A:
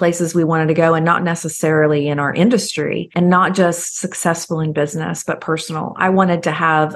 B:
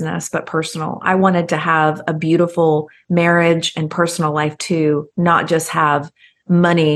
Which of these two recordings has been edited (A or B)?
A